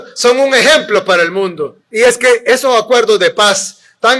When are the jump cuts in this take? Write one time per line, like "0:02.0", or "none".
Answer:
0:01.8